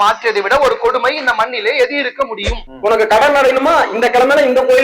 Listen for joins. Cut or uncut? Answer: cut